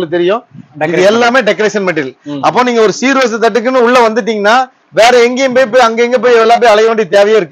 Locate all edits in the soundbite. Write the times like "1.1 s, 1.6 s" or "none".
none